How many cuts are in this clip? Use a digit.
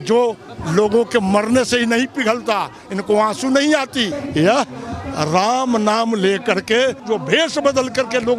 2